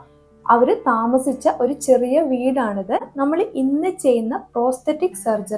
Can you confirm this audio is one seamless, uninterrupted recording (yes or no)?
no